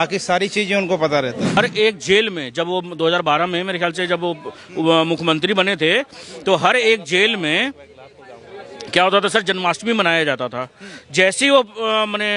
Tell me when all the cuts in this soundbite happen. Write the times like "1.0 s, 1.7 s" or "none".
1.6 s